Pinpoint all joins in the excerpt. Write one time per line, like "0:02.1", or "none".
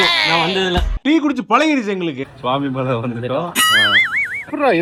none